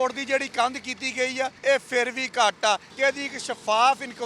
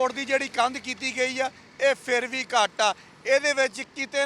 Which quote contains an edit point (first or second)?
first